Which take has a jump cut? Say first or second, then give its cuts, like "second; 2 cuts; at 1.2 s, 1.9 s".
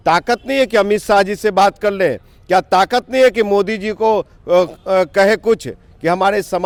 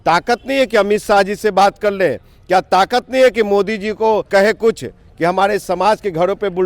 second; 1 cut; at 4.3 s